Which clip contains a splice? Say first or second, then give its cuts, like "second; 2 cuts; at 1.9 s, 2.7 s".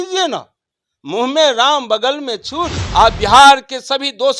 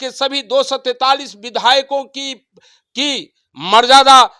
first; 1 cut; at 2.8 s